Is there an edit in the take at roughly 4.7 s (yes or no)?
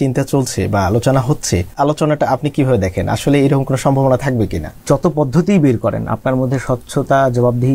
yes